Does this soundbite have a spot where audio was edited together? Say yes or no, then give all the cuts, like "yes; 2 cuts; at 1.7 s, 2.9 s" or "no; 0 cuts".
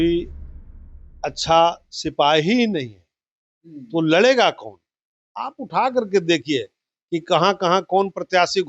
no; 0 cuts